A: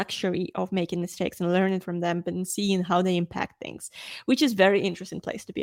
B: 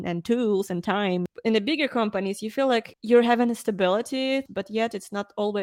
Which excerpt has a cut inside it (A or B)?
B